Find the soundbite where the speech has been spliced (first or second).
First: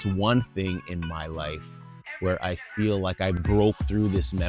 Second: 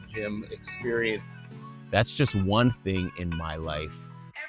second